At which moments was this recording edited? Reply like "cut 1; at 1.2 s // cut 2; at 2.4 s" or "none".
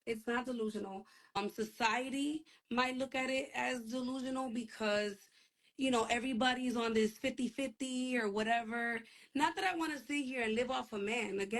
cut 1; at 1.3 s